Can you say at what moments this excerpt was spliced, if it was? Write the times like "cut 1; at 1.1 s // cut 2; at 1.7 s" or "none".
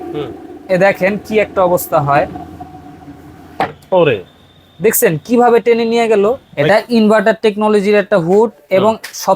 cut 1; at 6.5 s

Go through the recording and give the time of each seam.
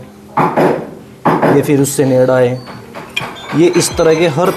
none

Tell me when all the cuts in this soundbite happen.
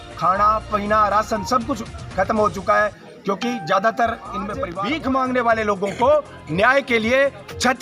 cut 1; at 4.6 s

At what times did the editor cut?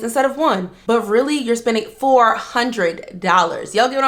none

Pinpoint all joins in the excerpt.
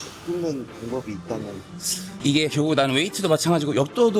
none

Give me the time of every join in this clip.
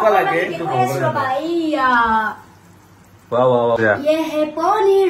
cut 1; at 3.8 s

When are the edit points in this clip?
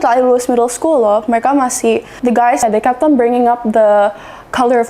cut 1; at 2.4 s

